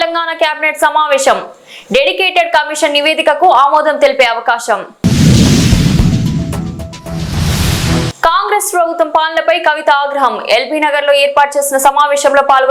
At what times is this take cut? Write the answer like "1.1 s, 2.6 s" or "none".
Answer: none